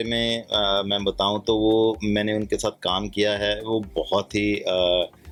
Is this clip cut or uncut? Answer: uncut